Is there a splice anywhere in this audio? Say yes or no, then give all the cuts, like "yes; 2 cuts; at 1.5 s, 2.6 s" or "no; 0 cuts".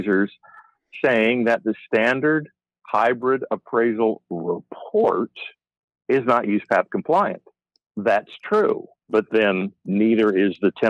no; 0 cuts